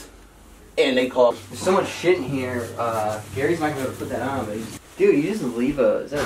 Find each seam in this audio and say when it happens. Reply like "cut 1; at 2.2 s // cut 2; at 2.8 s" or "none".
cut 1; at 1.4 s // cut 2; at 4.7 s